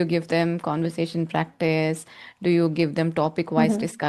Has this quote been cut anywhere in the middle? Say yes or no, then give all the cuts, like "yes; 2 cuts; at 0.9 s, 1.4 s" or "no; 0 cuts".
no; 0 cuts